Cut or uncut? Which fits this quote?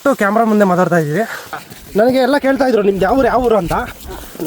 cut